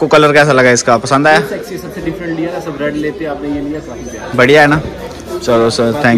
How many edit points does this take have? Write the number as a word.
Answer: zero